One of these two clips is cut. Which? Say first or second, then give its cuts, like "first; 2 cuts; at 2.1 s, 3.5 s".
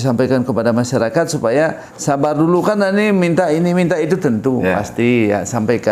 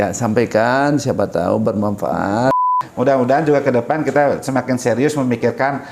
second; 1 cut; at 2.8 s